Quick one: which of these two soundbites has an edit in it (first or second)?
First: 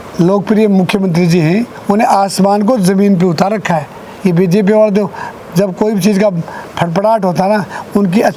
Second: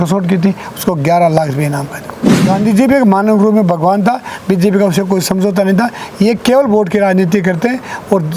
second